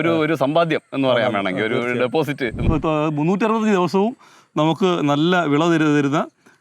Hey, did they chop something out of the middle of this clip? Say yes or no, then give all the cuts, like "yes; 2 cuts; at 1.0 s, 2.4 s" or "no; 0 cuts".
yes; 1 cut; at 2.6 s